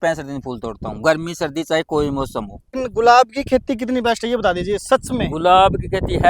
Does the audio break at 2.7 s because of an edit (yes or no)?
yes